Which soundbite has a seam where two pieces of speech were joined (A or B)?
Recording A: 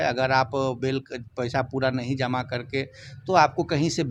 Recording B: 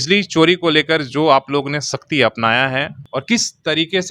B